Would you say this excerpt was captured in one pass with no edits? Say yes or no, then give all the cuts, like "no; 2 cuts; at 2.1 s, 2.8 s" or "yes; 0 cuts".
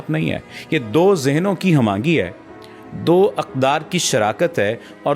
yes; 0 cuts